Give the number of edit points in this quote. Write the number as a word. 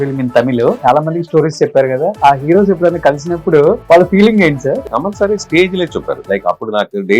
four